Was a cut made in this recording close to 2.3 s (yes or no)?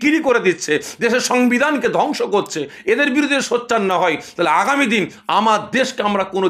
no